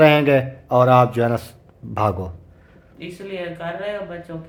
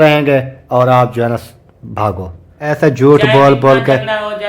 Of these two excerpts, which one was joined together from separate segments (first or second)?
second